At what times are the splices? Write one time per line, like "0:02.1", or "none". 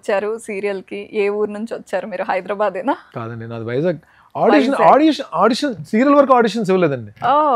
none